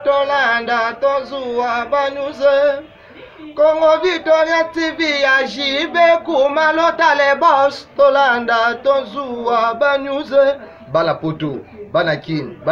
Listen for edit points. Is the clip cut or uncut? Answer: uncut